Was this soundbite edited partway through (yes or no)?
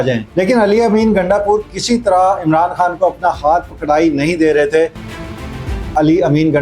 yes